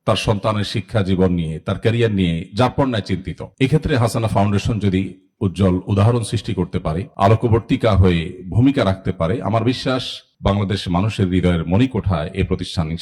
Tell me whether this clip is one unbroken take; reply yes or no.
yes